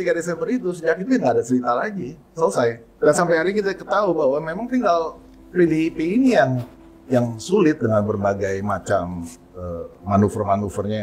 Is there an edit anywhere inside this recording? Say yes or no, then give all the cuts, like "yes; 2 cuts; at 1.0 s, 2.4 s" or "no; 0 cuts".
yes; 1 cut; at 2.9 s